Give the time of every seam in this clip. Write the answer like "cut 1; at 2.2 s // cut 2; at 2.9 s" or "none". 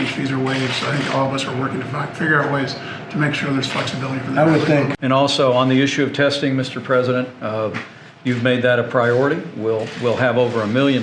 cut 1; at 5.0 s